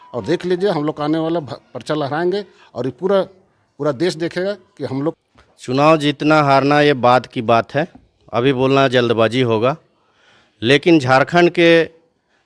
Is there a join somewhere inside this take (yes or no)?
yes